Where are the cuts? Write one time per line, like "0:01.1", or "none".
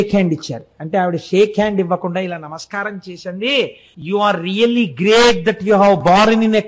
0:03.9